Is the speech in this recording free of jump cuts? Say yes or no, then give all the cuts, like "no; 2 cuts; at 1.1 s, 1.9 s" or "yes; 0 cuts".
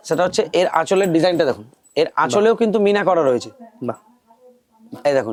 yes; 0 cuts